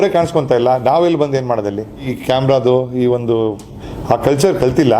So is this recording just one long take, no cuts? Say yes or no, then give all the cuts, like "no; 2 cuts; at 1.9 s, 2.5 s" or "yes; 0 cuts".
no; 1 cut; at 2.1 s